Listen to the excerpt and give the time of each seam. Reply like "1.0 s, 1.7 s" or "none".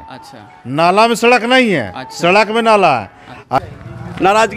3.6 s